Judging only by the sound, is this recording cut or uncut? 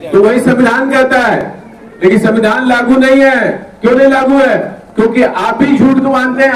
uncut